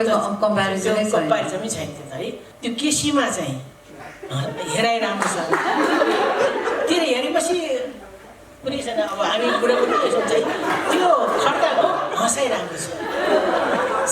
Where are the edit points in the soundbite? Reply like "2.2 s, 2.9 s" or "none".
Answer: 2.5 s